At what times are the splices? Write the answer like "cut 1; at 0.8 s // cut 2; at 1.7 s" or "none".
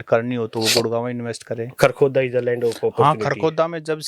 cut 1; at 1.7 s